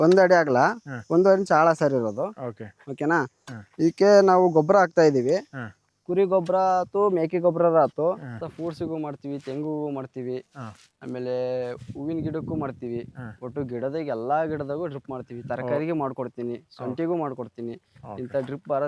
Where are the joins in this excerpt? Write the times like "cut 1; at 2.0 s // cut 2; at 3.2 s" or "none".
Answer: cut 1; at 8.3 s